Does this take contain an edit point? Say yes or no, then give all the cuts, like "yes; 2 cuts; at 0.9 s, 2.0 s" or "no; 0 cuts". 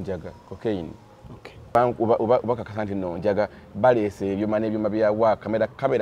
yes; 1 cut; at 1.8 s